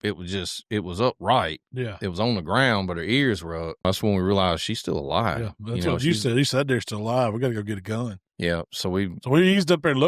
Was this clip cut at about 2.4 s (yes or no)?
no